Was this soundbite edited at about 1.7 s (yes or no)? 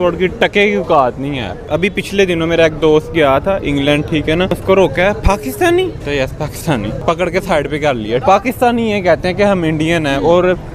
yes